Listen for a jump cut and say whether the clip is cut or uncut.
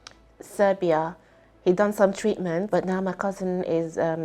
cut